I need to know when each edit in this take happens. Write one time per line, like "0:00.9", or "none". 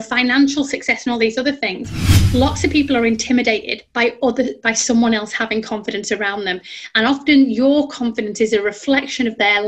0:02.1